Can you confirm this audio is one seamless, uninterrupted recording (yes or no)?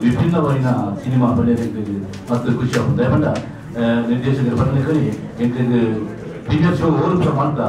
yes